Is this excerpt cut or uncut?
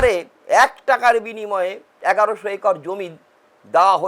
cut